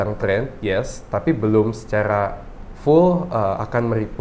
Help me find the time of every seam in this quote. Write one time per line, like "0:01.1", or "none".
none